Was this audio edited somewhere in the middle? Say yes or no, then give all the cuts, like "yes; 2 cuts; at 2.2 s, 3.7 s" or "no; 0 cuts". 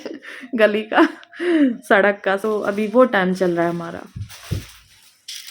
yes; 1 cut; at 2.4 s